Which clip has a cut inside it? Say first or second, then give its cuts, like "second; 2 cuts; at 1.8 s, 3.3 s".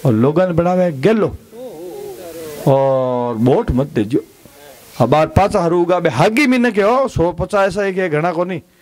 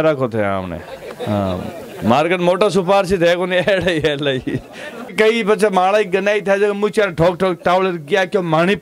second; 1 cut; at 5.1 s